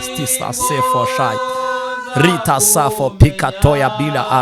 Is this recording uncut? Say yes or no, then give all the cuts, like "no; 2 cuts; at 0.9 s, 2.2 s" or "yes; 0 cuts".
yes; 0 cuts